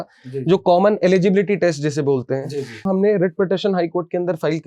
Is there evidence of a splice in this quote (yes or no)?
yes